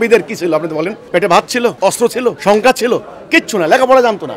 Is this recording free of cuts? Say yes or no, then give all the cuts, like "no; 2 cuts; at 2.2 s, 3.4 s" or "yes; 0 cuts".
no; 2 cuts; at 1.0 s, 2.1 s